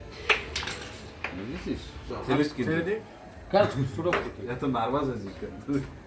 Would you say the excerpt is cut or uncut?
cut